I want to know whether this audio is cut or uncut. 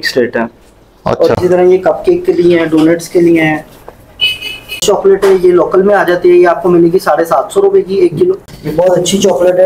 cut